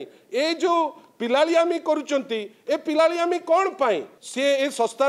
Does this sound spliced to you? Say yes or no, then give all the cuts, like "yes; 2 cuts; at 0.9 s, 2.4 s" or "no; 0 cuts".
yes; 1 cut; at 4.2 s